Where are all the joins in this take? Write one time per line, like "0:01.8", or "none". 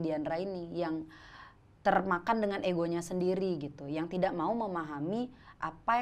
none